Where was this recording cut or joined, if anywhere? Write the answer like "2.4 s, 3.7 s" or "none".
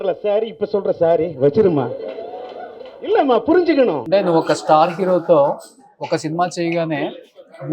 none